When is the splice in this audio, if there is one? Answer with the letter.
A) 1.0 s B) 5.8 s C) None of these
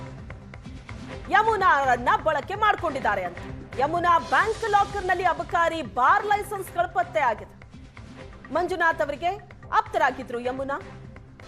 A